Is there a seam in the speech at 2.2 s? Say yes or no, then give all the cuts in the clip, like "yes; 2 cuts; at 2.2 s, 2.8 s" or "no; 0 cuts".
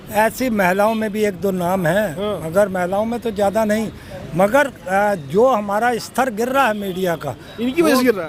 no; 0 cuts